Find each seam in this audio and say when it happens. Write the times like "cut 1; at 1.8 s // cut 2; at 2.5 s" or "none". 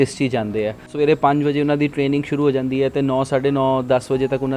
cut 1; at 0.9 s